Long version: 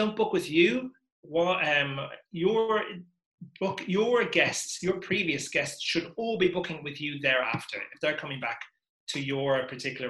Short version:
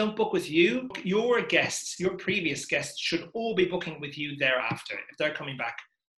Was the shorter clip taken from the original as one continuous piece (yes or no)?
no